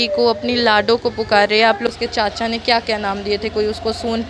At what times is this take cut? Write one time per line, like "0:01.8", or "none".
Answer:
0:01.9